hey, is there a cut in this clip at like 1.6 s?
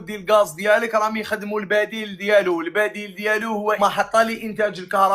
no; 1 cut; at 3.8 s

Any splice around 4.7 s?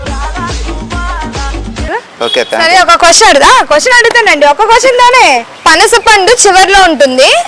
no; 1 cut; at 1.9 s

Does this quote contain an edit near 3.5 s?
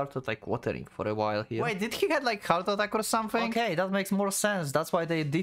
yes; 2 cuts; at 1.7 s, 3.5 s

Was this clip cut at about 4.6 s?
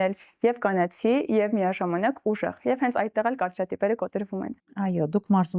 no; 0 cuts

